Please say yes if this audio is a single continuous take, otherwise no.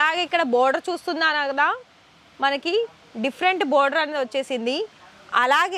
yes